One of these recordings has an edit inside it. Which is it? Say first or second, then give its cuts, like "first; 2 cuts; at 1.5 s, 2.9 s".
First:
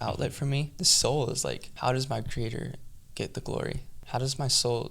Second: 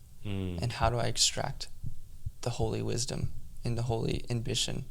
first; 3 cuts; at 0.9 s, 1.7 s, 3.9 s